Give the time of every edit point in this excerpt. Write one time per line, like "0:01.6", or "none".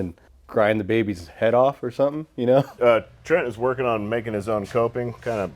0:02.7